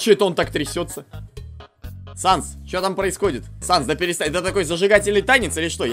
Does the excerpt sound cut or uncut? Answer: uncut